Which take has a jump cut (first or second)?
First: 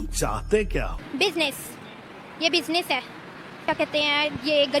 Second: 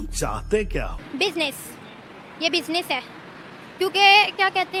first